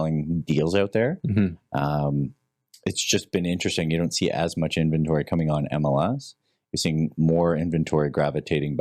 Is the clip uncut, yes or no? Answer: yes